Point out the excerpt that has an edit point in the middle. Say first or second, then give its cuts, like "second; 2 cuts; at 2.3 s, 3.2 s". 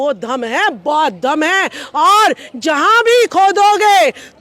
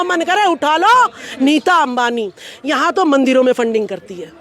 second; 1 cut; at 1.3 s